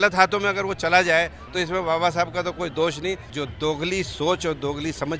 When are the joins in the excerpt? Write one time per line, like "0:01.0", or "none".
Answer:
0:03.3